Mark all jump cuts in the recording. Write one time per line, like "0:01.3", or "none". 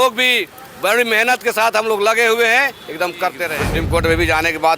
0:03.8

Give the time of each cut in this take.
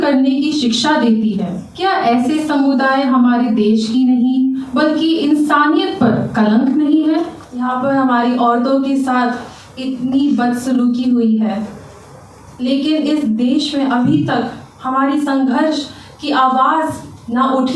0:01.6
0:07.4

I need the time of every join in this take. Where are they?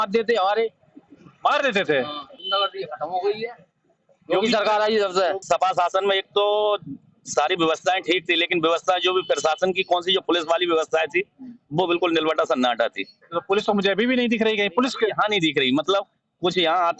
0:02.4
0:05.4

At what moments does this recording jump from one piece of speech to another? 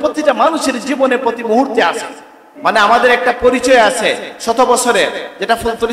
0:02.4

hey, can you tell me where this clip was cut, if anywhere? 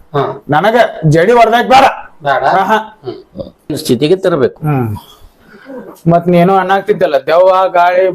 0:03.8

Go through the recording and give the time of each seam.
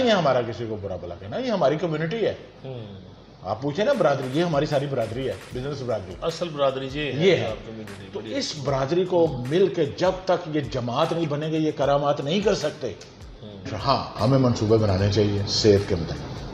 0:13.8

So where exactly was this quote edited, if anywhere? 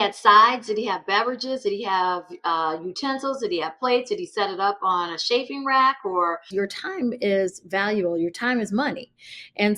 0:06.5

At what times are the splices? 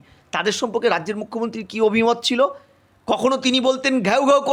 none

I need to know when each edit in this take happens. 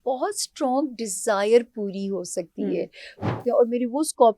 0:03.3

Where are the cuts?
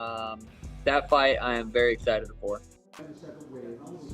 0:02.8

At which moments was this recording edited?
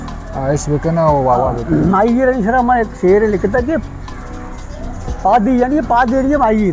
none

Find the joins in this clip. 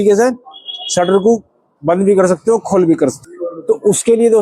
0:03.2

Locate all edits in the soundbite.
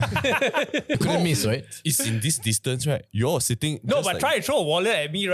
0:01.0

